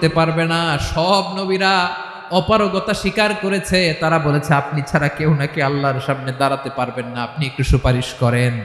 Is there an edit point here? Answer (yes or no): no